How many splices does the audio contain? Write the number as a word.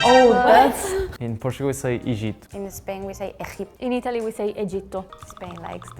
two